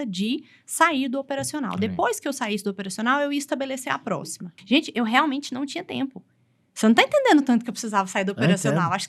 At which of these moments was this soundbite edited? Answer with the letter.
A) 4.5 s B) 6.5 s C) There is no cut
A